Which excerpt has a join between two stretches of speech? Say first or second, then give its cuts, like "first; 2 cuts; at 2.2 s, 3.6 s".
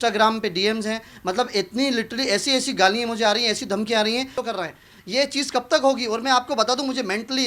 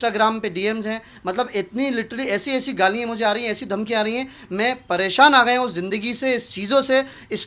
first; 1 cut; at 4.4 s